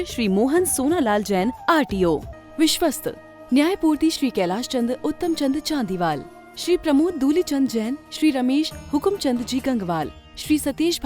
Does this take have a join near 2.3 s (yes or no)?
yes